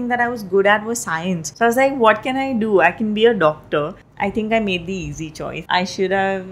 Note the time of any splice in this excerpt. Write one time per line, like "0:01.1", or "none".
0:01.4
0:04.0
0:05.5

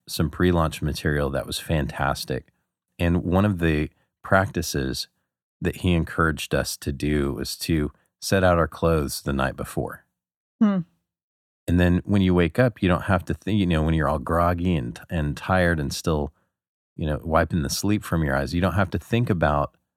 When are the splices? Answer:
none

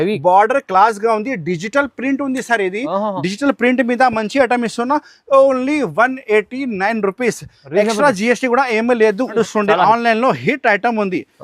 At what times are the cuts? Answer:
0:09.3

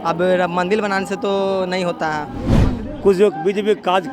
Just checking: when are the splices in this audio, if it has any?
0:02.6

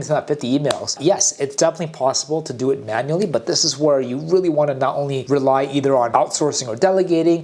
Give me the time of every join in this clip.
none

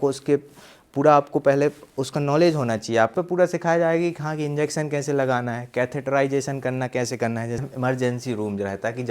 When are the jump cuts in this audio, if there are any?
0:03.1
0:07.6

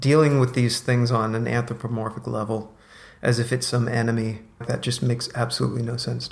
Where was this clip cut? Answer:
0:04.6

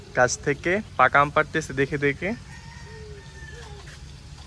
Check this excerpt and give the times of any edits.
none

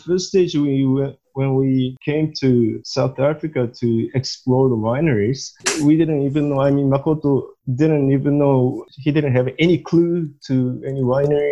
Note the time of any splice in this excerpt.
0:02.0
0:02.8
0:08.8

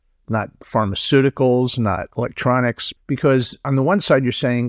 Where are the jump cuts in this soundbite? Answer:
0:03.2

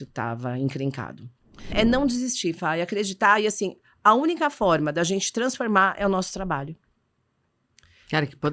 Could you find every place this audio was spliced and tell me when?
0:01.7

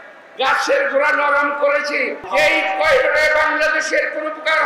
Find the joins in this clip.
0:02.2

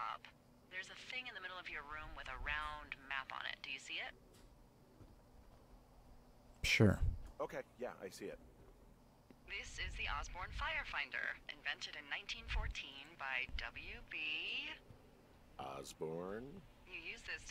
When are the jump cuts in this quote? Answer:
none

